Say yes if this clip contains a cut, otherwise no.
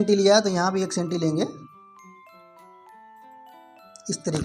no